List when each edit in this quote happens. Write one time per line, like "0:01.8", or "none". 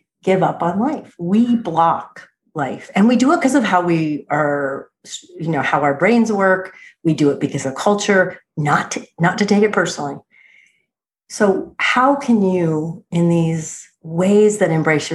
none